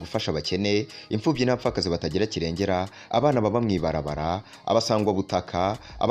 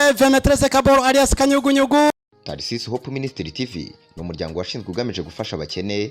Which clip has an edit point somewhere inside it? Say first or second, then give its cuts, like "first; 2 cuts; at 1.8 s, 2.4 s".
second; 1 cut; at 2.1 s